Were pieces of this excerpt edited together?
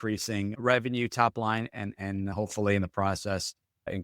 no; 0 cuts

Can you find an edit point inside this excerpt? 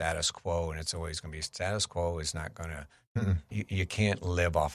no; 0 cuts

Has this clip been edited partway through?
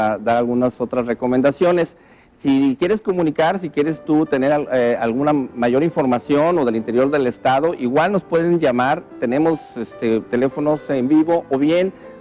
yes; 1 cut; at 8.9 s

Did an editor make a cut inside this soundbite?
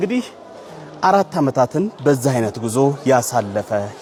no; 0 cuts

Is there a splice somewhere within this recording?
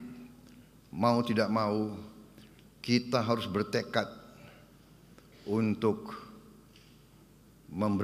no; 0 cuts

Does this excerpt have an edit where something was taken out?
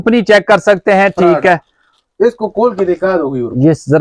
no; 0 cuts

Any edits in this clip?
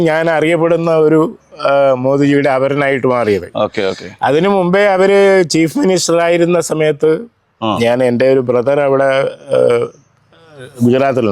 no; 0 cuts

